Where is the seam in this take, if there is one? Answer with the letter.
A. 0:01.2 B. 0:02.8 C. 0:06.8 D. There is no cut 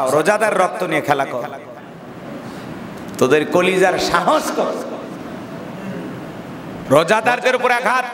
C